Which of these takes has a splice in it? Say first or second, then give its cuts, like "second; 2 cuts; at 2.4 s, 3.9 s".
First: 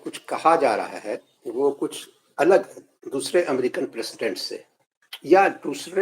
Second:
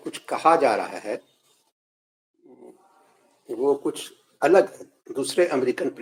first; 1 cut; at 1.3 s